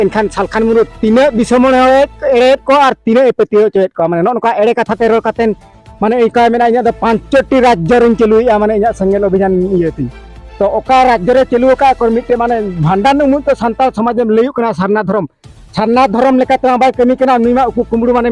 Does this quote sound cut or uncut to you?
uncut